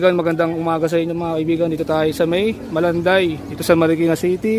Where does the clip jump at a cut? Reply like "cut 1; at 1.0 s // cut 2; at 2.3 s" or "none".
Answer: none